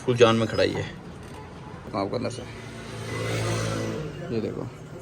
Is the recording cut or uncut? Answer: cut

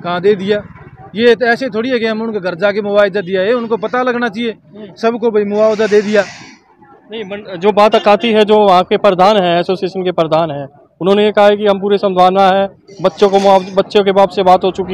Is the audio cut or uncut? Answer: uncut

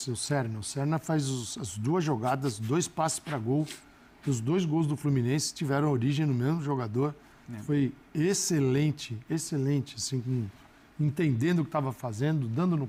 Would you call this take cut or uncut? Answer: uncut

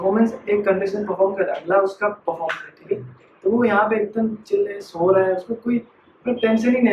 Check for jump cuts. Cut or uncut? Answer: uncut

